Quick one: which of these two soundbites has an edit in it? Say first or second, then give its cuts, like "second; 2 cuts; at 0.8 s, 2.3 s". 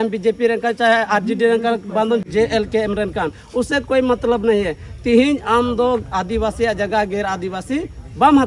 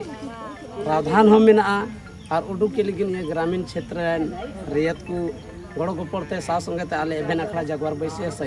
first; 1 cut; at 2.2 s